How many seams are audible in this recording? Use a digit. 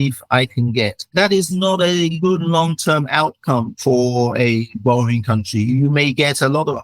3